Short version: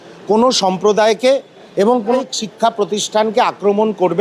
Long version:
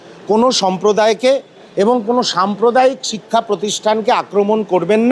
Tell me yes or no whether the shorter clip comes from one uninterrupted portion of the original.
no